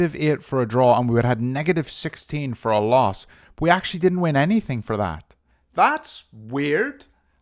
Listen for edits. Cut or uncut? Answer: uncut